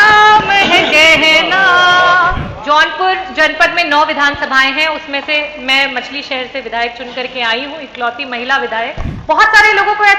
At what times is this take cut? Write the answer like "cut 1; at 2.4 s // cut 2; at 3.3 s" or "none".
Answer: cut 1; at 2.5 s // cut 2; at 9.1 s